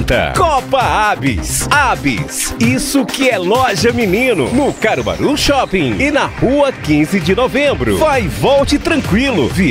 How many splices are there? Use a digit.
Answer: 1